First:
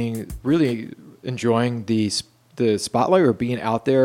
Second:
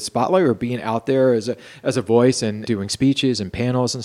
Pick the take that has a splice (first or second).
second